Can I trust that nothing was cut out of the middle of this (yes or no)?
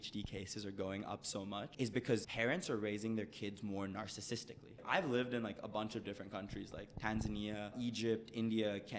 no